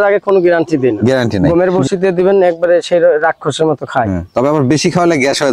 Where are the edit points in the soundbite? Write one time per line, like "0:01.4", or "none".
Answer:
0:01.4